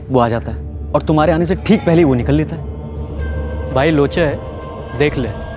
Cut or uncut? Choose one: uncut